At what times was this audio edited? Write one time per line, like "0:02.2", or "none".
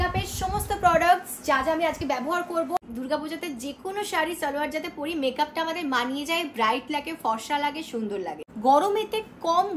0:02.8
0:08.4